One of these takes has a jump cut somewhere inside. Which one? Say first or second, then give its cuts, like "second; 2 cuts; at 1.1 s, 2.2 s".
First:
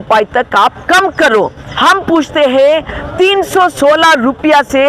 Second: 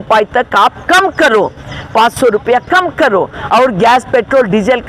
first; 1 cut; at 1.6 s